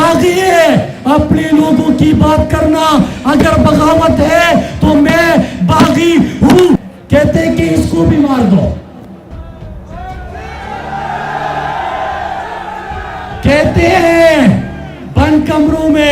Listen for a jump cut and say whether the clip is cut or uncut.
cut